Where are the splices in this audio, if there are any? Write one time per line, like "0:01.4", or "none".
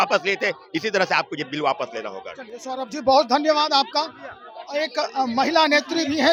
none